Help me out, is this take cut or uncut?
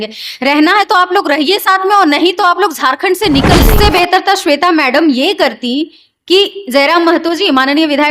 cut